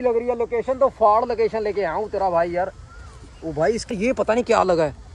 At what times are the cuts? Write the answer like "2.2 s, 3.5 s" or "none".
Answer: 3.9 s